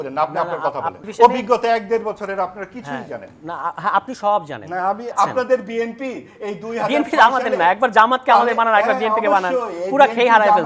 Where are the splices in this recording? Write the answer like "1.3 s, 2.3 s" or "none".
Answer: 1.1 s, 5.1 s